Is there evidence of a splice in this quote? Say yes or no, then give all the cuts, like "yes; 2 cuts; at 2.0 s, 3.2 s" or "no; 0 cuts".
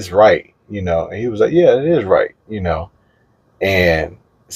no; 0 cuts